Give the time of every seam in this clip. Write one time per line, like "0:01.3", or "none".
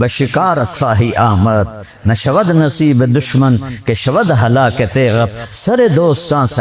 none